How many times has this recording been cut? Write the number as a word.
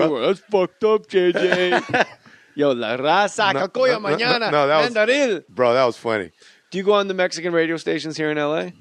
one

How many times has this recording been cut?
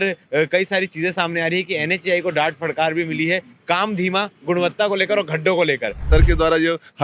one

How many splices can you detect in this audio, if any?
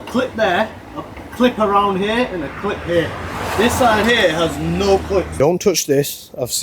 one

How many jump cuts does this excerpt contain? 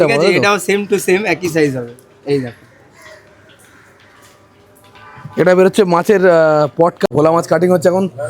one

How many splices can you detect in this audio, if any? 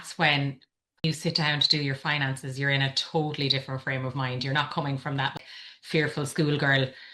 two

